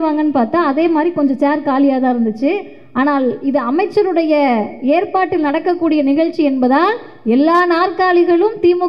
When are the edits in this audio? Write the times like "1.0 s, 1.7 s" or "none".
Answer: none